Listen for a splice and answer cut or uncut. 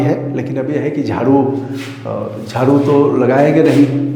uncut